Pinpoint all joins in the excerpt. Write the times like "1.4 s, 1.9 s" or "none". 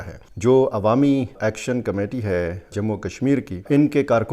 1.3 s